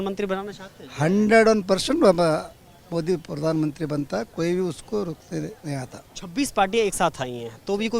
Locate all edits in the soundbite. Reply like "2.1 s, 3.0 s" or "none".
none